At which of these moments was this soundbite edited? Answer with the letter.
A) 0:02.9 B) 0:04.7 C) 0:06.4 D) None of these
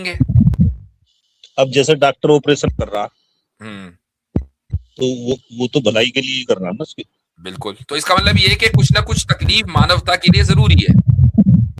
D